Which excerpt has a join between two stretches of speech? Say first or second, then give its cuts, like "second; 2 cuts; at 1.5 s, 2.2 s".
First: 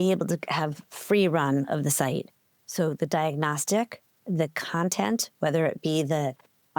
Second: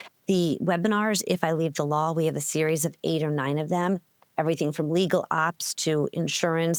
first; 1 cut; at 4.2 s